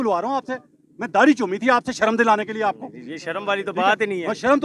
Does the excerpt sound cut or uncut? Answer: uncut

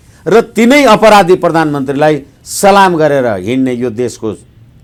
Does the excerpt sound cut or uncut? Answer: uncut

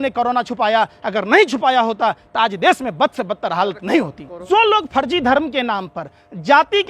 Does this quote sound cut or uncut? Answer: cut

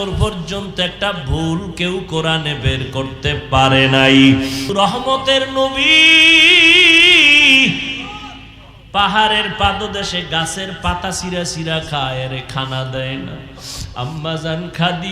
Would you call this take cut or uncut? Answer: cut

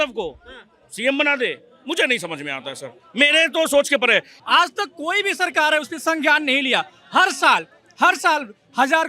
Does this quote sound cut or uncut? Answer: cut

